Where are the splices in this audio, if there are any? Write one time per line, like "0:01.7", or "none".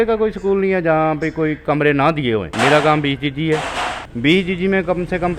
0:02.5
0:04.0

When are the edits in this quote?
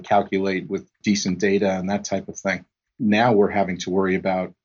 0:01.0

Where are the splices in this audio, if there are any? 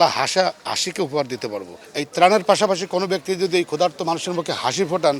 0:01.8

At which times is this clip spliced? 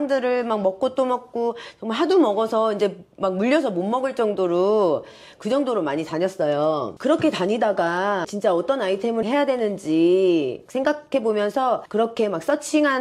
0:08.3
0:10.6
0:11.9

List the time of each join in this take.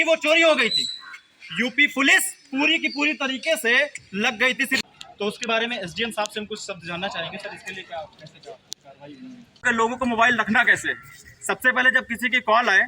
0:04.8
0:09.6

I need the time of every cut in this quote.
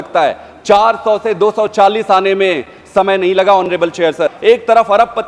0:04.4

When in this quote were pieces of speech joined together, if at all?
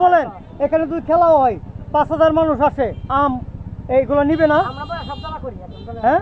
none

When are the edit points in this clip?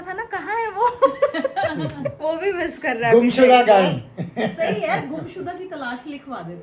none

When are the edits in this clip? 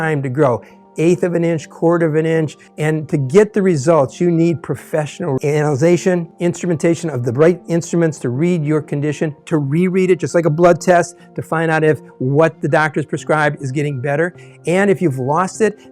0:02.6

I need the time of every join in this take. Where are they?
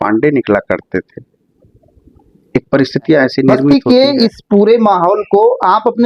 0:03.7

